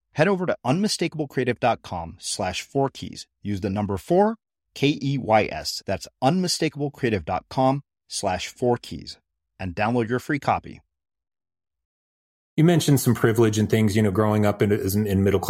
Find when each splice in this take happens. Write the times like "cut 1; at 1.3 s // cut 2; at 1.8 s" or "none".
cut 1; at 12.4 s